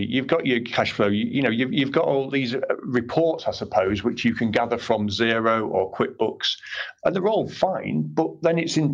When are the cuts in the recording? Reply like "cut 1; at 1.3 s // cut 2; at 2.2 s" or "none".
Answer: cut 1; at 2.3 s // cut 2; at 6.8 s